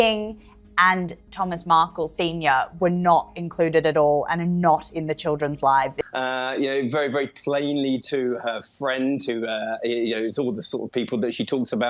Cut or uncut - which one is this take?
cut